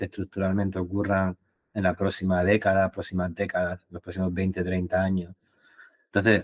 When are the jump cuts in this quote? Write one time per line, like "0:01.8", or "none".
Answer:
none